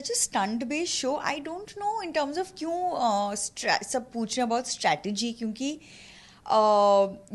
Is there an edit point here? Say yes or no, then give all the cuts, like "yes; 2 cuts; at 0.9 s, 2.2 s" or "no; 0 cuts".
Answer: no; 0 cuts